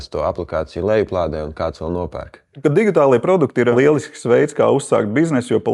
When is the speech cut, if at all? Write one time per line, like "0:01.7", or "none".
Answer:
0:02.6
0:03.7